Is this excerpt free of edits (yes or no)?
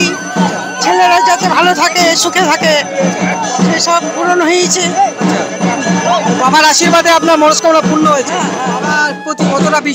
no